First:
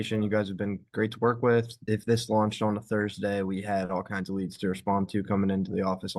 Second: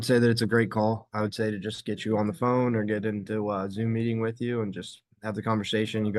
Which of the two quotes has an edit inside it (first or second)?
first